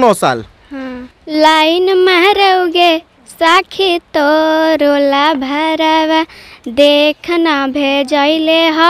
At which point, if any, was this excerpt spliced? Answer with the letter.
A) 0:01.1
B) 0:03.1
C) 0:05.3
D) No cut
A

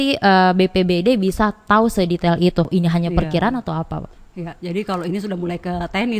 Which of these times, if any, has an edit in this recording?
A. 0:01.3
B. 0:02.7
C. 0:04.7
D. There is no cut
B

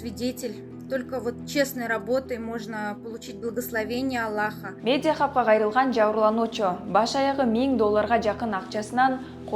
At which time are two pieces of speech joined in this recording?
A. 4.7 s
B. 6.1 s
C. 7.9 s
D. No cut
A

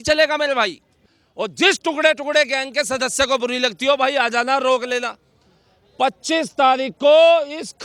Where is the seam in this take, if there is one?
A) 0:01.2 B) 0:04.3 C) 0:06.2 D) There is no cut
A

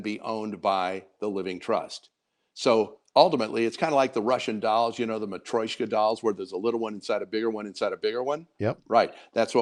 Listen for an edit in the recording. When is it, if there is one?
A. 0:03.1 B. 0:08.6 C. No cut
C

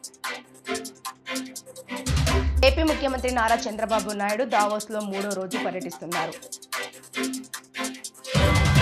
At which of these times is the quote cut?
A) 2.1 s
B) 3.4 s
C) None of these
A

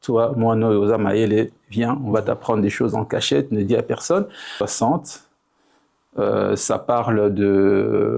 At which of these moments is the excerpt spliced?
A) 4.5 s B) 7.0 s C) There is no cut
A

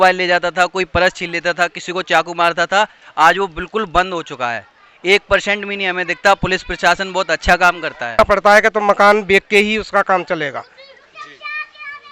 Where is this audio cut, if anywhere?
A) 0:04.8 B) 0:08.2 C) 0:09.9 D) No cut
B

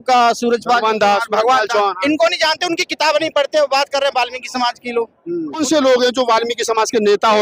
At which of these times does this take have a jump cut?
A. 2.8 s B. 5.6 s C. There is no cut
B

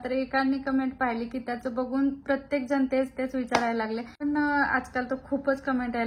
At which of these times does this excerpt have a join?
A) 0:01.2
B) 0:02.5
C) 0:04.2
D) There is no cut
C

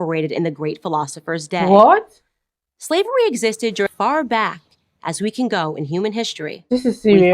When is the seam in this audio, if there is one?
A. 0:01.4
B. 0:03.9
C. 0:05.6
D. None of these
B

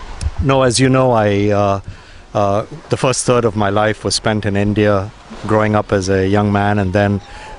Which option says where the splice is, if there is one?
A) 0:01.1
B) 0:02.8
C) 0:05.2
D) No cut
C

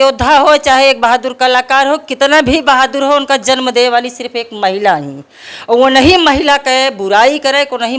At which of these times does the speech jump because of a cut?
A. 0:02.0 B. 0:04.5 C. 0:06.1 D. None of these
D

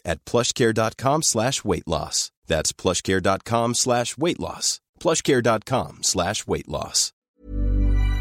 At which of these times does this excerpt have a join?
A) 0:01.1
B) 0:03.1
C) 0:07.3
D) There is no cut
C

